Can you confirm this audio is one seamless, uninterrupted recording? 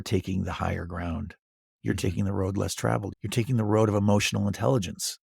no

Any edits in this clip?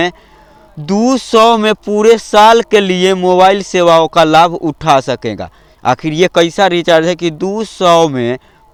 no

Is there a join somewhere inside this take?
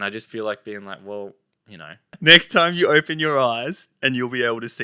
yes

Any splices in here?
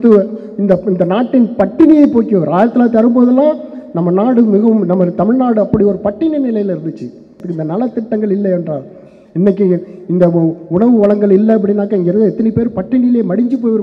yes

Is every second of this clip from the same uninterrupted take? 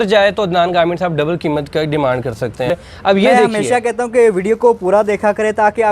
no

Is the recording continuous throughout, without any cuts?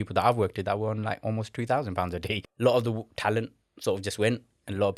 no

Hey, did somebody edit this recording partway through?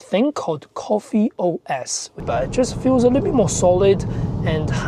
yes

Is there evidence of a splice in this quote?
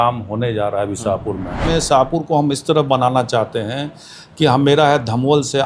yes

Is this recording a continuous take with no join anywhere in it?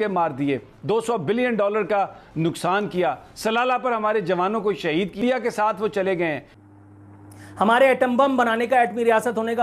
no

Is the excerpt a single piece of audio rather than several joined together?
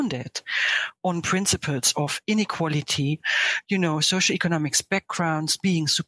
no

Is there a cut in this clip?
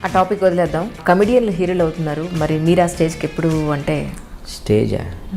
yes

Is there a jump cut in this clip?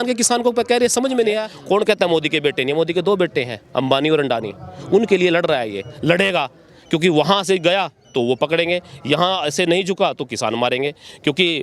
yes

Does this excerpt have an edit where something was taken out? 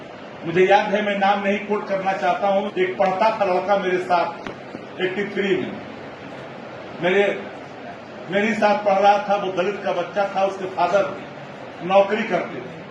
yes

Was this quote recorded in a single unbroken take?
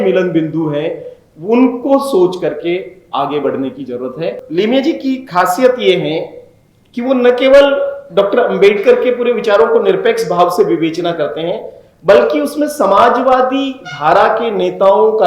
no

